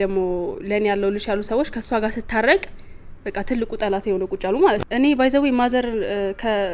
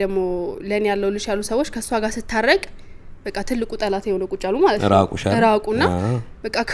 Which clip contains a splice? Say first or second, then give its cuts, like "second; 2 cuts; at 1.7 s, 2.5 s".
first; 1 cut; at 4.8 s